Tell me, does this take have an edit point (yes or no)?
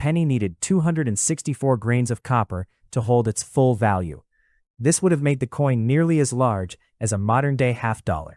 no